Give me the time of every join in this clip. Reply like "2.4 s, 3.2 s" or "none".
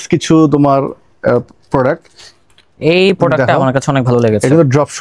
none